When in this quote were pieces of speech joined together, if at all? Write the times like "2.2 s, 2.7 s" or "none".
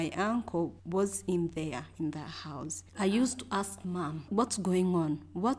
2.8 s, 4.3 s